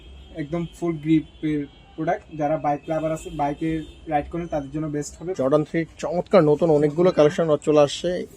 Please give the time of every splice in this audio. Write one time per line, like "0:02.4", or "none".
0:05.4